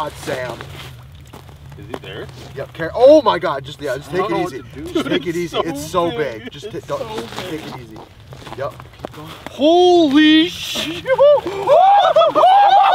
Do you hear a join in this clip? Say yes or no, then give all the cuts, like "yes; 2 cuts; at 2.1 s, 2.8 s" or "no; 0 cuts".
no; 0 cuts